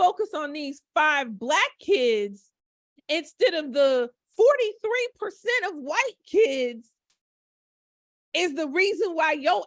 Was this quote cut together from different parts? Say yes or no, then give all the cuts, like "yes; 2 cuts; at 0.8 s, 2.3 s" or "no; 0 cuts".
no; 0 cuts